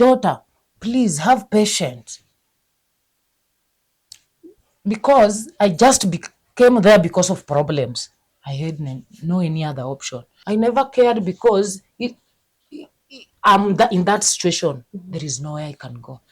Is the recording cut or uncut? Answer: cut